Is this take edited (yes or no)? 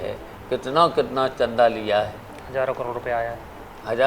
no